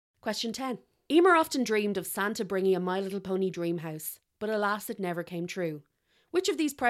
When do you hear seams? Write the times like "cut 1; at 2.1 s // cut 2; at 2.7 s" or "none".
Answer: cut 1; at 1.0 s